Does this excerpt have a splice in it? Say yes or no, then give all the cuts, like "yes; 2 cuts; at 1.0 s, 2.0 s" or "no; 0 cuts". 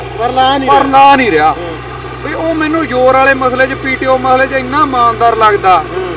no; 0 cuts